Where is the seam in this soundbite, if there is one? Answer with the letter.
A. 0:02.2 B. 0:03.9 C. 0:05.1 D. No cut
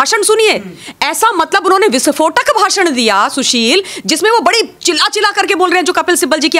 D